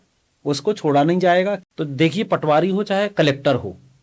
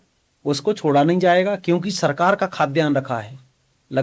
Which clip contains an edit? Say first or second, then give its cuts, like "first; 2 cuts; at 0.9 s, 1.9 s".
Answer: first; 1 cut; at 1.6 s